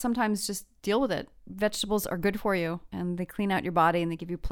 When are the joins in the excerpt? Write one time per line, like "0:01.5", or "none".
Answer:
0:02.9